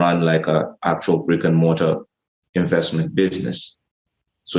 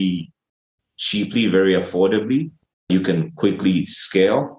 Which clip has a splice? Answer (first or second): second